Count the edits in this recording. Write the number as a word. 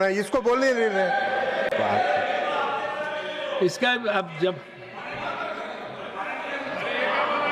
zero